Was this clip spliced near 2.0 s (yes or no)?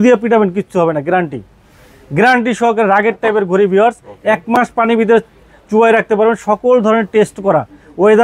no